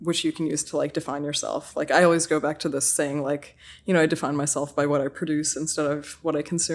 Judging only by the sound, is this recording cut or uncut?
uncut